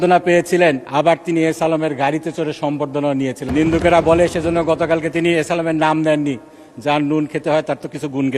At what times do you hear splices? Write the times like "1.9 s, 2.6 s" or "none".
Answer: 0.8 s, 3.4 s